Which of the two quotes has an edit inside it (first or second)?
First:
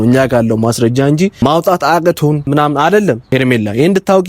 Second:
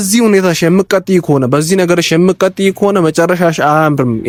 first